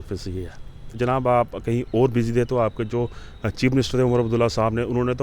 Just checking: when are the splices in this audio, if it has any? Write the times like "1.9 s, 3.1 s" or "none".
1.0 s

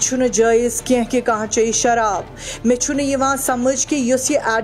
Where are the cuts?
none

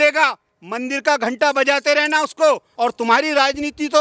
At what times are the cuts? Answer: 2.7 s

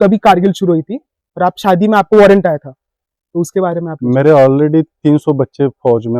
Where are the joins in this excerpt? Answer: 4.0 s

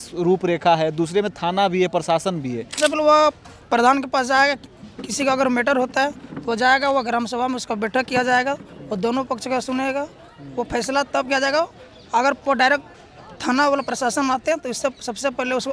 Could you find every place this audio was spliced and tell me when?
2.8 s

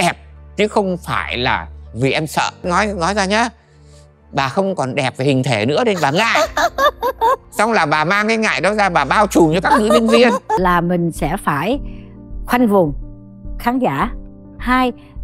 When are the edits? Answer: 2.6 s, 10.6 s

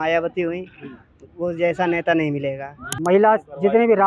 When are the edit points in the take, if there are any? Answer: 2.9 s

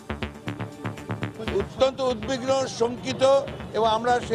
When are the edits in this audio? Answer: 1.3 s

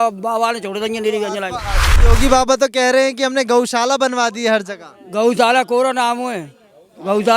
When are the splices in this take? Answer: 1.9 s

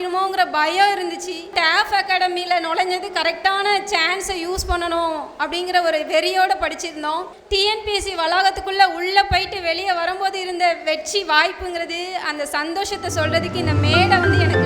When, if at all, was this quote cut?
1.5 s, 7.3 s

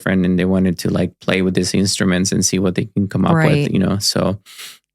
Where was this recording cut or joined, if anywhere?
none

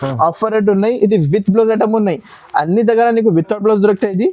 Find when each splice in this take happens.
none

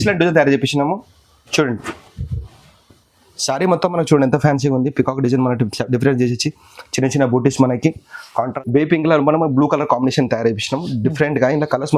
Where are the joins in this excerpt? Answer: 8.6 s

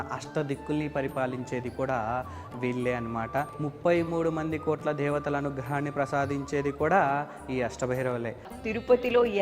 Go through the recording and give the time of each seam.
3.6 s, 8.5 s

